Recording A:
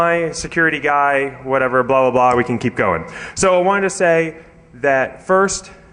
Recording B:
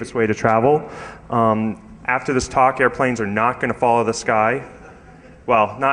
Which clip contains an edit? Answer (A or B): A